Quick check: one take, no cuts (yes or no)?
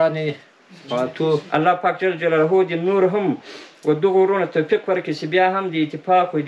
no